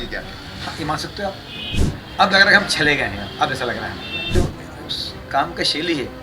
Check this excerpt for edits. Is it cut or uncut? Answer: cut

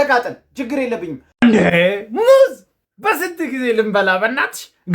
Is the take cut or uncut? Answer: cut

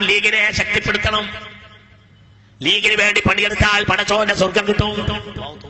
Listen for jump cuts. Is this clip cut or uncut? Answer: uncut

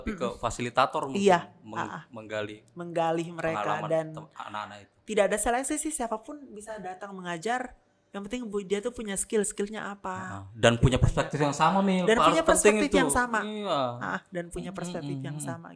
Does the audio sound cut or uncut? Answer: uncut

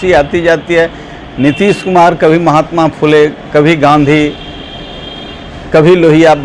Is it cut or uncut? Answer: uncut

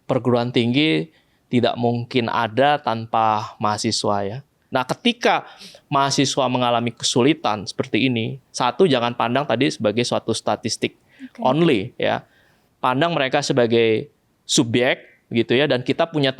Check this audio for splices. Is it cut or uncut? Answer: cut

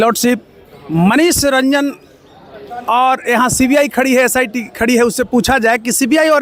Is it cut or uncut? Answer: uncut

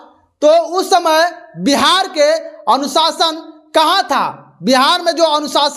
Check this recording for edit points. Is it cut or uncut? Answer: uncut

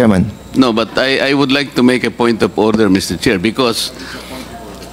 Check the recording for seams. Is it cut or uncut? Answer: uncut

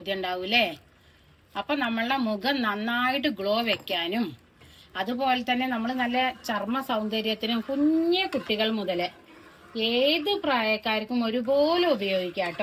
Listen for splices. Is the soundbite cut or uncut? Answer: uncut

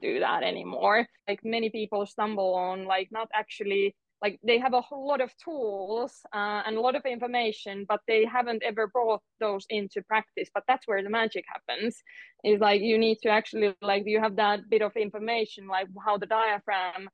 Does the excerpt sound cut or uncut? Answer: cut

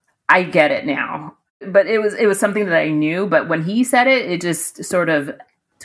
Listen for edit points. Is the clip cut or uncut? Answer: cut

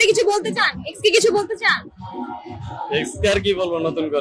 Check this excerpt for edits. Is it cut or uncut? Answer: uncut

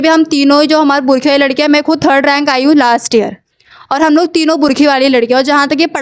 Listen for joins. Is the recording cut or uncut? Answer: uncut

